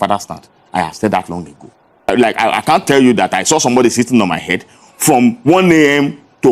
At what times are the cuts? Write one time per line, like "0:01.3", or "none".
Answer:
0:02.0